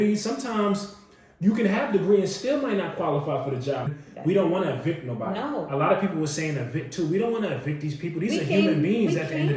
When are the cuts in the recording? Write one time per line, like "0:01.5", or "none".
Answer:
0:04.0